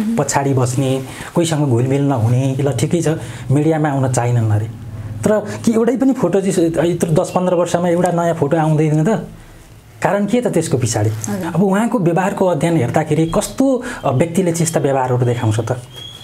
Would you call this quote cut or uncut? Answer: cut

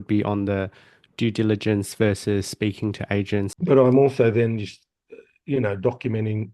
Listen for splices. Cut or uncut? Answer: cut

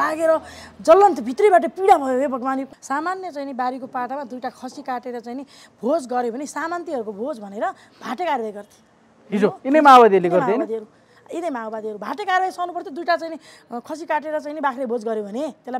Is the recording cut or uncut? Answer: cut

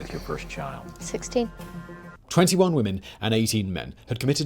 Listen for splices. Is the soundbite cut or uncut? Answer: cut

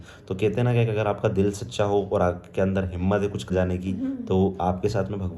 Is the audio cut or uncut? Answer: cut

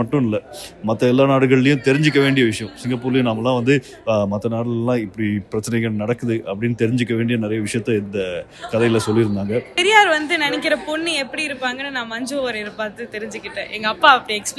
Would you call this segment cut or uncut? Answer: cut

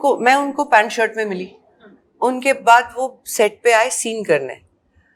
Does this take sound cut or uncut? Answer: uncut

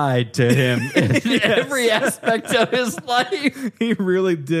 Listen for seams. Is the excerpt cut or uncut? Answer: uncut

